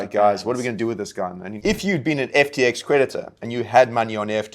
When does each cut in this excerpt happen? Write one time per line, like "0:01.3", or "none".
0:01.4